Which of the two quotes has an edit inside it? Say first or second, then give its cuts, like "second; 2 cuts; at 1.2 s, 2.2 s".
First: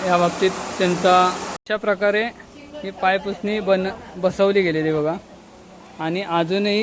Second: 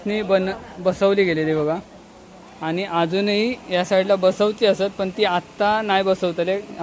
first; 1 cut; at 1.5 s